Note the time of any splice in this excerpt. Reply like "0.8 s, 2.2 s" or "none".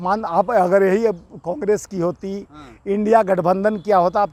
none